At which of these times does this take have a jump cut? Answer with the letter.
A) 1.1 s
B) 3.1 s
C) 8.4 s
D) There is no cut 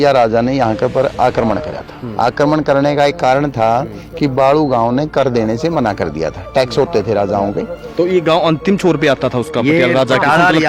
D